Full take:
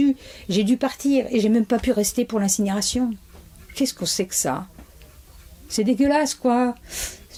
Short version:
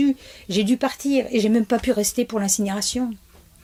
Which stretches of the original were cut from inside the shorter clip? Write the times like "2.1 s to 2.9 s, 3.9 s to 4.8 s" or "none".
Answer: none